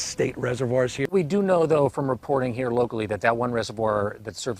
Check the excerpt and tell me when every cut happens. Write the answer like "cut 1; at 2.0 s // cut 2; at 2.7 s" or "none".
cut 1; at 1.1 s